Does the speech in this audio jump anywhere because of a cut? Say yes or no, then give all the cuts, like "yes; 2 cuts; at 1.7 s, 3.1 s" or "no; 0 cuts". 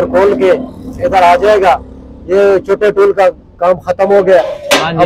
no; 0 cuts